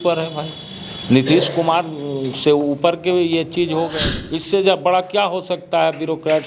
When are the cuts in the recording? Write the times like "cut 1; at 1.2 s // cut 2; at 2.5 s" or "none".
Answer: cut 1; at 3.9 s